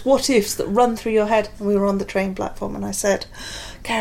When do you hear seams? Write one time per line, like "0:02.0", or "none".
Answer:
0:01.5

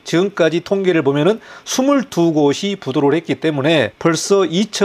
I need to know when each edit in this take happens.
0:03.9

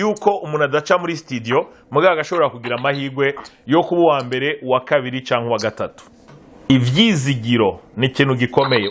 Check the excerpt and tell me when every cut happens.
0:06.7

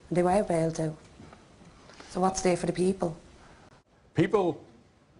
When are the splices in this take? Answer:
0:01.8

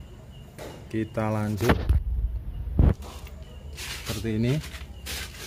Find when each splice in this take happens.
0:02.9

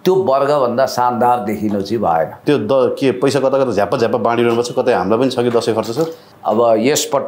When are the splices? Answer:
0:02.4
0:06.3

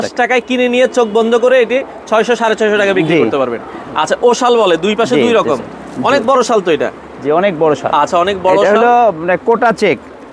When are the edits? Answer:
none

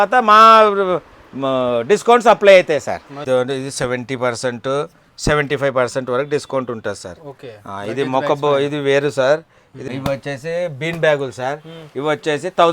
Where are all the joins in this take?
0:03.1
0:09.9

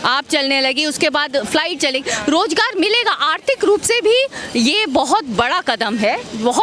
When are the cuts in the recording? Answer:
none

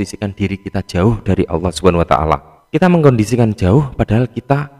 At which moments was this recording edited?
0:02.6

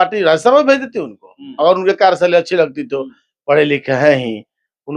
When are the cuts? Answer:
none

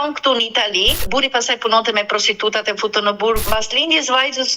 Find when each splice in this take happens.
0:01.0
0:03.4

